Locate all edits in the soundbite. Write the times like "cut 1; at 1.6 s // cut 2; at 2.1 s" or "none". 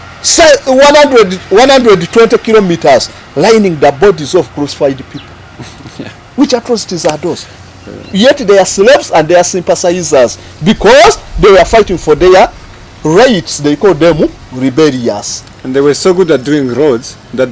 none